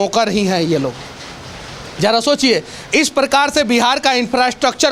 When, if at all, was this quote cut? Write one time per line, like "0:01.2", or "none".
none

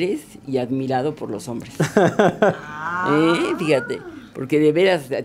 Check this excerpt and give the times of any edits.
none

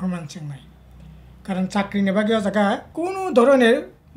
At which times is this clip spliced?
0:02.9

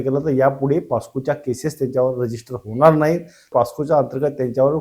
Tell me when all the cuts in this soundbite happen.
0:03.5

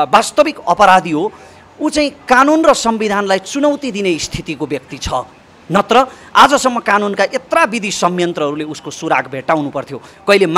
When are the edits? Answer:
none

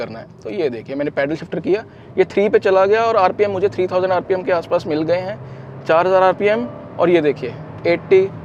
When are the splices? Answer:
none

